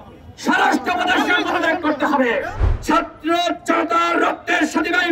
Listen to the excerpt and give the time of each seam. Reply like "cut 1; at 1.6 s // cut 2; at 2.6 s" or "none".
cut 1; at 2.4 s